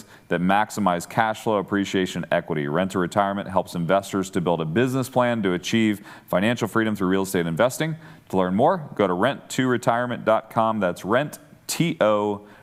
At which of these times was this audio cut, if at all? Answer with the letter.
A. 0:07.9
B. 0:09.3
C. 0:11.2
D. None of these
D